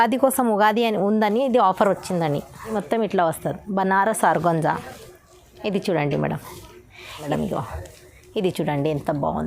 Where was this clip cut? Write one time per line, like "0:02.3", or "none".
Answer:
0:02.7
0:07.3